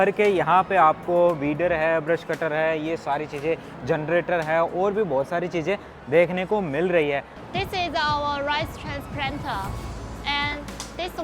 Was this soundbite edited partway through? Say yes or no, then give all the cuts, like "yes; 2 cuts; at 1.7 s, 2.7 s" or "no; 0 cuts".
yes; 1 cut; at 7.3 s